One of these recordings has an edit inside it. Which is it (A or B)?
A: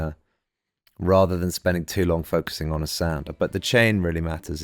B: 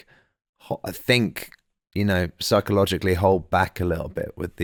A